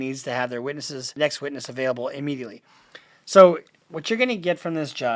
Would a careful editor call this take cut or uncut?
cut